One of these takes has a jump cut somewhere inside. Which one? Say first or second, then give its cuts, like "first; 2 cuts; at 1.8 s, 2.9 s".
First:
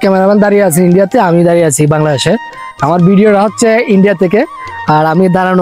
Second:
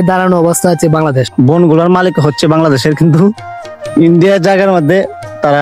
second; 1 cut; at 1.3 s